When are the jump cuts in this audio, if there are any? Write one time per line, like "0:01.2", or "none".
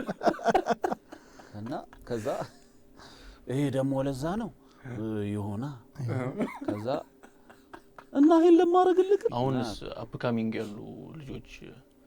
0:09.3